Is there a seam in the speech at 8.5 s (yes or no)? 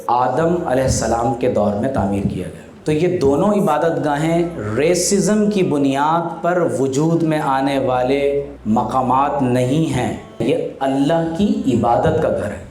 no